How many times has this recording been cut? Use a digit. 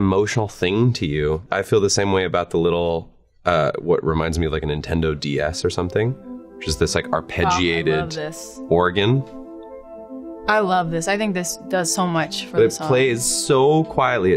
0